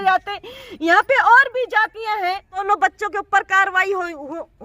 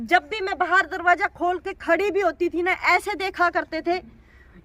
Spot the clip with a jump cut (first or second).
first